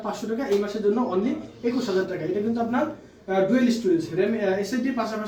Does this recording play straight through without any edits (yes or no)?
yes